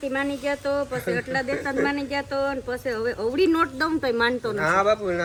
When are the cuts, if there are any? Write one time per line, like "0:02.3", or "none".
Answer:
none